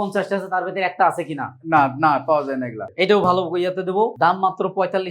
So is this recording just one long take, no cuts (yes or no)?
no